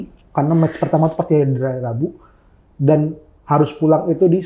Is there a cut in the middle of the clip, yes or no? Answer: no